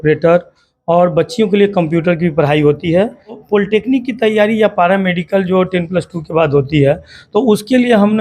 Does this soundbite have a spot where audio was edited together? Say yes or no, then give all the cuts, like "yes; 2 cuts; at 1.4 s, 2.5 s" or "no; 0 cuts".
yes; 1 cut; at 3.4 s